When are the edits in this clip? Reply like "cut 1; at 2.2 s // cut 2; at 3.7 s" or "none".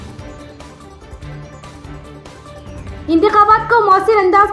cut 1; at 1.3 s

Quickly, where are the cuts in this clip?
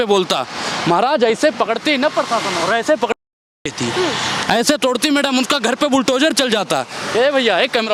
none

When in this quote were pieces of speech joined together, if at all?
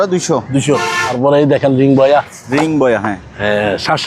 cut 1; at 1.2 s

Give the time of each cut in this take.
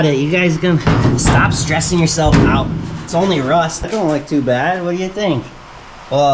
cut 1; at 3.9 s

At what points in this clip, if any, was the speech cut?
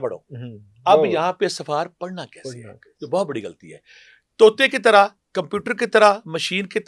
none

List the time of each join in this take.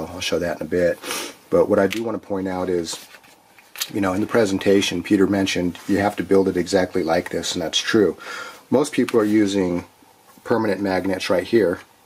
cut 1; at 1.8 s

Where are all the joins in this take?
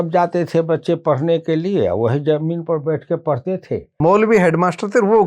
cut 1; at 4.0 s

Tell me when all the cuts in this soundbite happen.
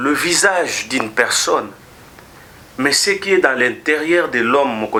none

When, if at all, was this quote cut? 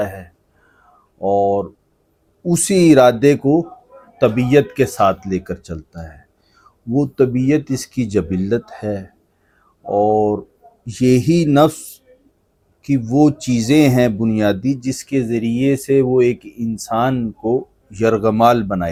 none

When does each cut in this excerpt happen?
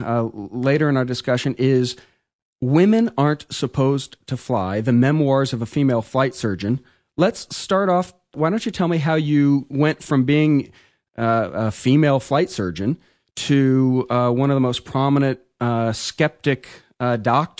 cut 1; at 10.3 s

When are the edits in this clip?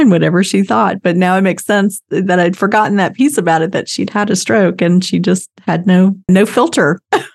cut 1; at 6.3 s

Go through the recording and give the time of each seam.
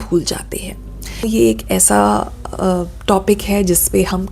cut 1; at 1.2 s

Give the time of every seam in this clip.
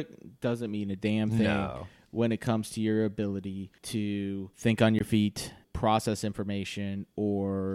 cut 1; at 3.7 s // cut 2; at 4.5 s // cut 3; at 5.7 s

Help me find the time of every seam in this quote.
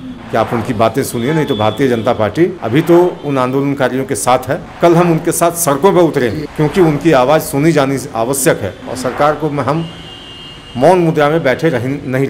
cut 1; at 2.6 s // cut 2; at 4.7 s // cut 3; at 6.4 s

